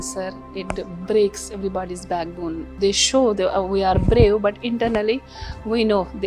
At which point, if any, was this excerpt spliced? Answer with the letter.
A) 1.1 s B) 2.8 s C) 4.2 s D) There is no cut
B